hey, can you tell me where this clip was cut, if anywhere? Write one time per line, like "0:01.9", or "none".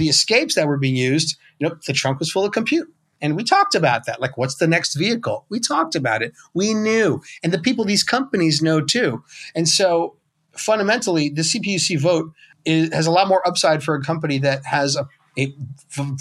0:12.5
0:15.2